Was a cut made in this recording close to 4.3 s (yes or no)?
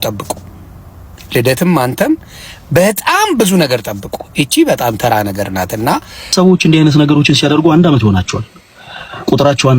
no